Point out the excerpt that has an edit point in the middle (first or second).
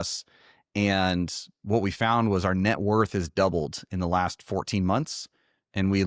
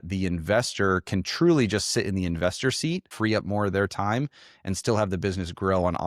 second